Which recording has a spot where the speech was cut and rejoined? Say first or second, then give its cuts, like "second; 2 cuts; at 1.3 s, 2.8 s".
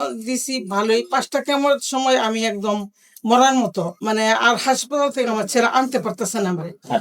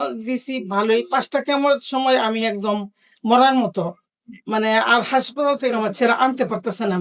first; 1 cut; at 4.0 s